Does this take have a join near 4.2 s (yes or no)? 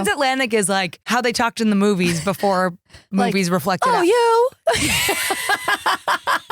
no